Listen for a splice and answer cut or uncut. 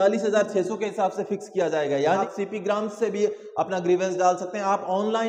cut